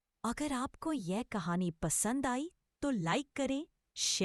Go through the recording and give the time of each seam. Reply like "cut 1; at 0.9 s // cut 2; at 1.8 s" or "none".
none